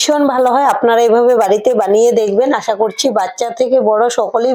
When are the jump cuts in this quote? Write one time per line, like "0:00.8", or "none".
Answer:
none